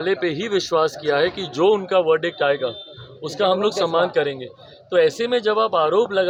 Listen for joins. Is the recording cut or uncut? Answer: uncut